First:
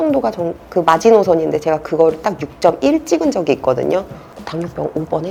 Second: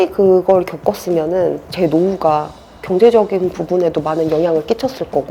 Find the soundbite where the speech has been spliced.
second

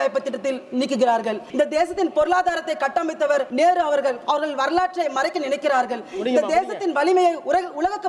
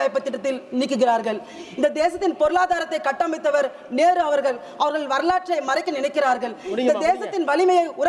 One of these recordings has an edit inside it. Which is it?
first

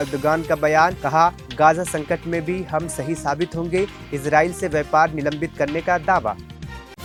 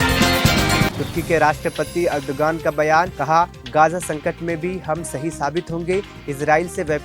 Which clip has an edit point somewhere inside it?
second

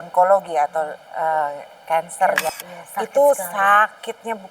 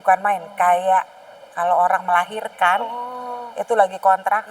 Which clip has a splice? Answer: first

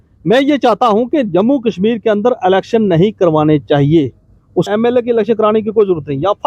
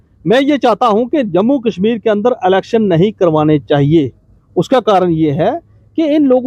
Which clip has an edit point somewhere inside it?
first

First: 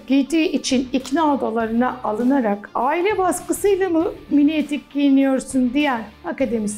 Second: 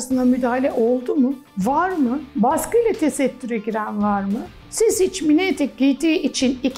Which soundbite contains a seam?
second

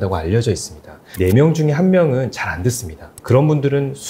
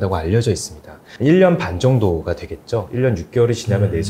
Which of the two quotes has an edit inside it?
first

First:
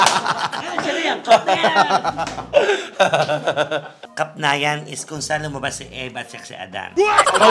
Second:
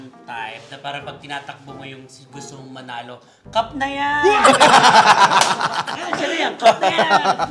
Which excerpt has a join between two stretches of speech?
first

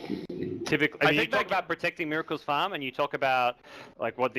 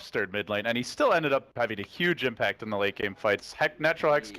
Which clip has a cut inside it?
second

